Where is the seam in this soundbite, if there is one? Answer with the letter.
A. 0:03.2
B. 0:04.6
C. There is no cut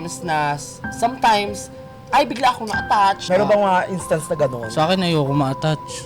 A